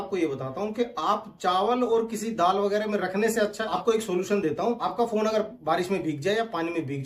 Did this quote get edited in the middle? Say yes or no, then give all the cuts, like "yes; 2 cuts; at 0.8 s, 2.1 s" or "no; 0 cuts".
no; 0 cuts